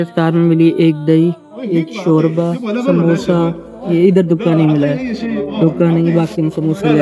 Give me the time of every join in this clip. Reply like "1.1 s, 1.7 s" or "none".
none